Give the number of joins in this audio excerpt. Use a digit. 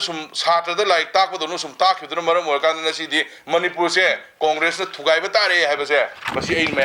0